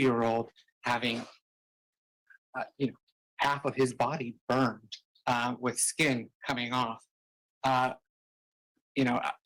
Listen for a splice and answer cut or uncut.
uncut